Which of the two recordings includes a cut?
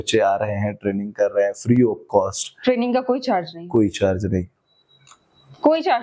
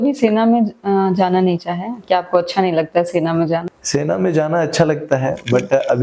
second; 1 cut; at 3.8 s

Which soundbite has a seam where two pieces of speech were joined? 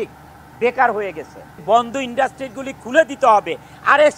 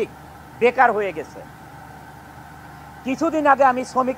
first; 1 cut; at 1.6 s

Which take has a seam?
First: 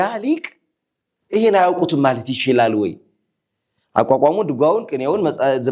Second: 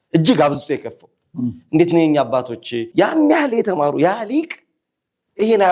second; 1 cut; at 2.9 s

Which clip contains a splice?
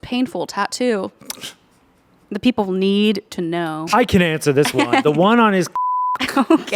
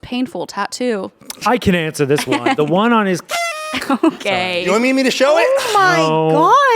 second; 1 cut; at 1.3 s

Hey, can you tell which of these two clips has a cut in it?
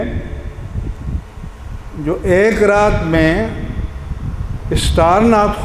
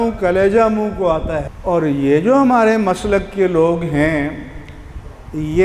second; 1 cut; at 1.5 s

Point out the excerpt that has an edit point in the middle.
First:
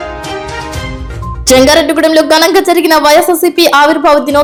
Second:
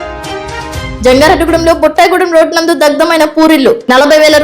second; 1 cut; at 0.9 s

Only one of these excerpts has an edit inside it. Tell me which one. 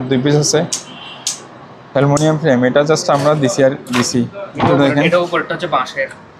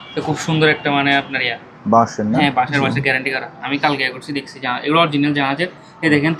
first; 1 cut; at 4.5 s

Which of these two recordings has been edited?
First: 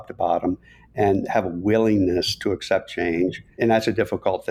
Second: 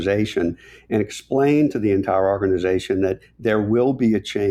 first; 1 cut; at 3.6 s

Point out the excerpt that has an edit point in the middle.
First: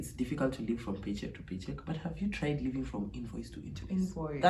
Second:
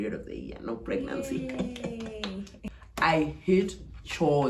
second; 1 cut; at 2.5 s

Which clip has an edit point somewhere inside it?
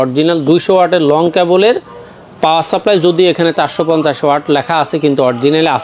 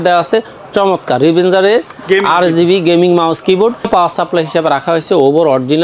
second; 1 cut; at 3.9 s

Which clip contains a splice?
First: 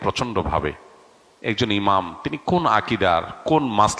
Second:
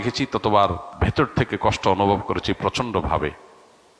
second; 1 cut; at 1.0 s

